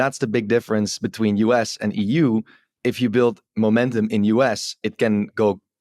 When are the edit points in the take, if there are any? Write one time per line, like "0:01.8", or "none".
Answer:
none